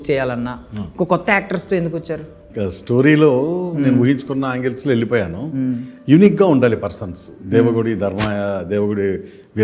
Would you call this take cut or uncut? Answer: cut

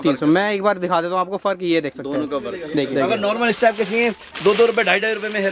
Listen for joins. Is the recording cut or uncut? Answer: cut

